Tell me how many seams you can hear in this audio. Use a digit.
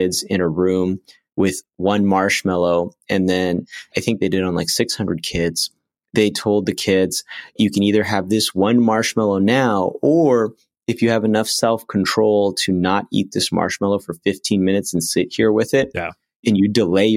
3